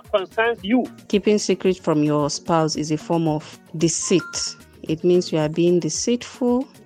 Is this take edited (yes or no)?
yes